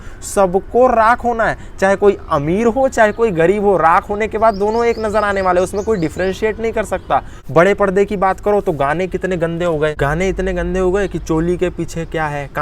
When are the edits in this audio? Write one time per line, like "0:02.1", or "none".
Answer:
0:07.4
0:09.9